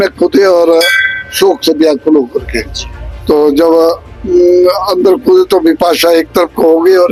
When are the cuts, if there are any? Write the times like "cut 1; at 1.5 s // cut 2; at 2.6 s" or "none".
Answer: none